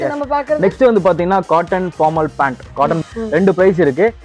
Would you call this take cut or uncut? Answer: cut